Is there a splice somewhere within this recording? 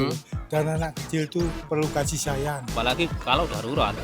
yes; 1 cut; at 2.7 s

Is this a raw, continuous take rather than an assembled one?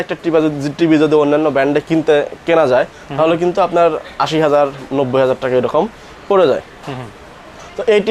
yes; 0 cuts

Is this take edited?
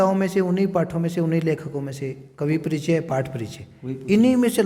no; 0 cuts

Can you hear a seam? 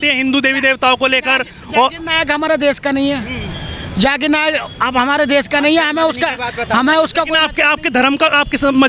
no; 0 cuts

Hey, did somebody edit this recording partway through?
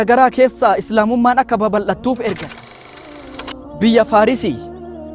yes; 1 cut; at 3.2 s

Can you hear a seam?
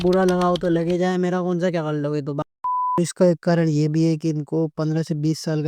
yes; 1 cut; at 2.5 s

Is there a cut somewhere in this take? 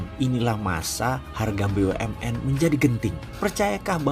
no; 0 cuts

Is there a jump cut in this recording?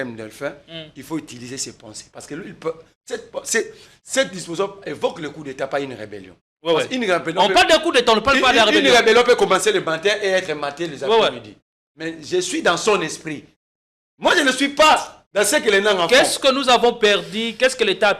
no; 0 cuts

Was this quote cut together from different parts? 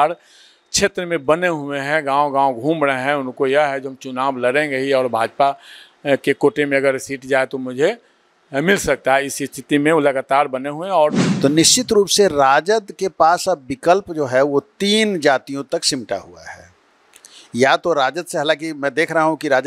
yes; 1 cut; at 11.2 s

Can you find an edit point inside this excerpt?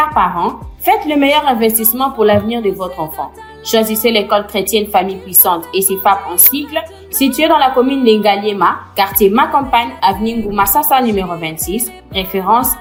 no; 0 cuts

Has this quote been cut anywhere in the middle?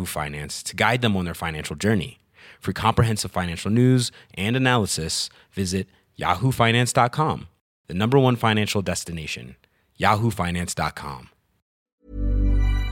yes; 1 cut; at 11.9 s

